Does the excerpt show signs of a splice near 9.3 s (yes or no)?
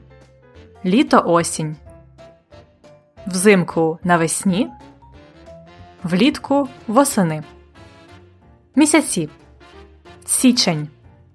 no